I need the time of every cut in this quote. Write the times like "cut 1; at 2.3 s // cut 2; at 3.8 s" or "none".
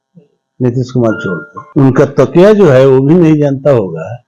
cut 1; at 1.5 s